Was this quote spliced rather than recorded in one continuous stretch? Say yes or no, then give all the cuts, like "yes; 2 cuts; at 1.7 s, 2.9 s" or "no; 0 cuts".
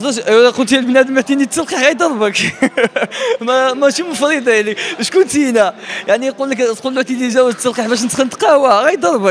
no; 0 cuts